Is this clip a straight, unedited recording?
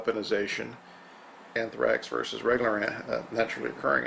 yes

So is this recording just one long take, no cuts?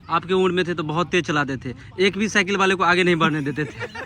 yes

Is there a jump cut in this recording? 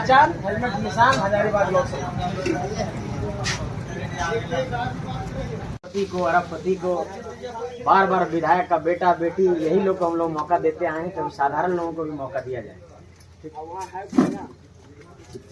no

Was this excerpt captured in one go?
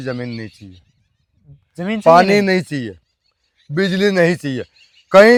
yes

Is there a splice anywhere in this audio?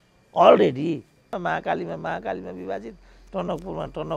yes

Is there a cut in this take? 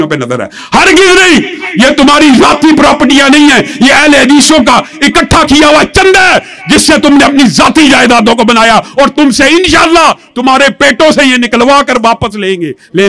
no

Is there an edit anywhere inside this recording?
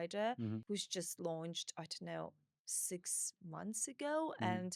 no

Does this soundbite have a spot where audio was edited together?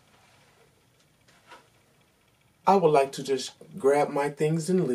yes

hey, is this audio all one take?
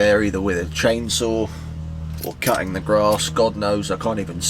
yes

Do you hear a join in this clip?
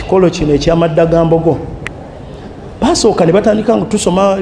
no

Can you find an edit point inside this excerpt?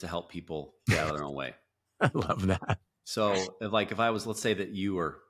no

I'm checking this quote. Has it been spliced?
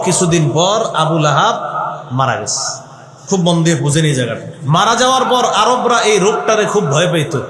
yes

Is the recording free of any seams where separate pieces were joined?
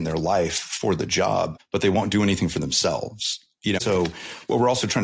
no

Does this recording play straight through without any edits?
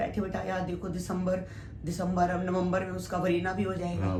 yes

